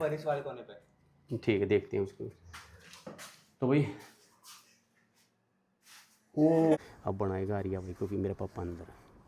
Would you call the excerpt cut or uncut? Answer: cut